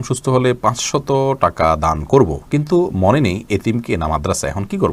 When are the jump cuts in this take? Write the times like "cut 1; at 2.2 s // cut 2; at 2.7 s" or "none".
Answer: none